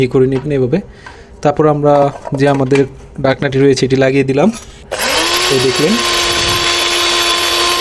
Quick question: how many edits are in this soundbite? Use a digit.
1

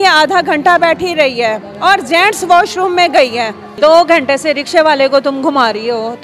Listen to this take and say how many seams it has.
1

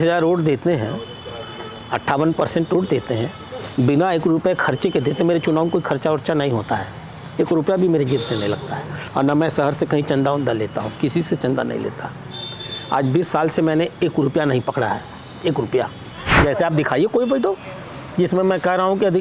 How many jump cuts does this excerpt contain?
1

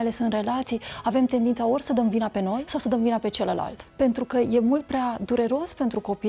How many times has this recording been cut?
2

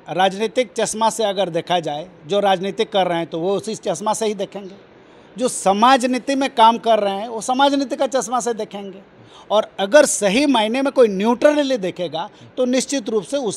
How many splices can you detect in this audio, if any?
0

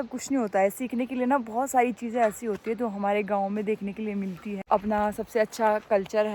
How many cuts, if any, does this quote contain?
1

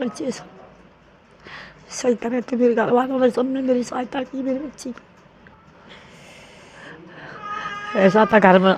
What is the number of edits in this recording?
1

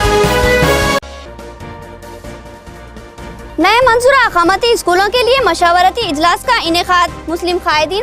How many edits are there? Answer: 1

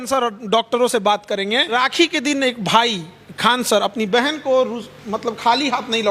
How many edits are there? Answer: 1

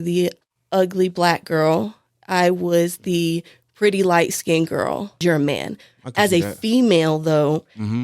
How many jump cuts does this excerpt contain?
1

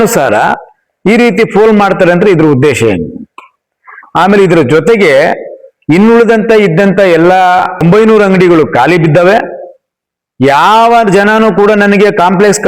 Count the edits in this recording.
1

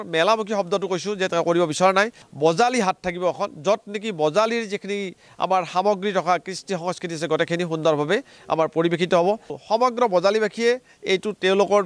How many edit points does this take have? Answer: 2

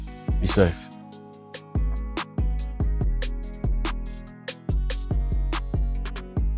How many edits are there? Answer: 1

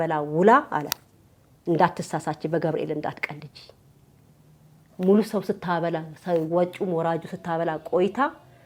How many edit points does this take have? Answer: 0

